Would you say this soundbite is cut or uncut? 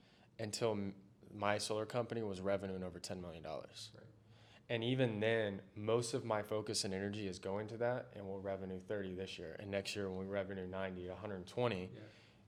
uncut